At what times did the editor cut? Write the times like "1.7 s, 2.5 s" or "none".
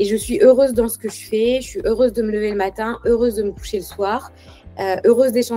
none